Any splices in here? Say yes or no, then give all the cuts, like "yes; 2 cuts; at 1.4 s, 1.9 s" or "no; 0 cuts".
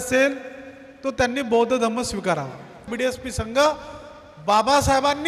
yes; 1 cut; at 2.8 s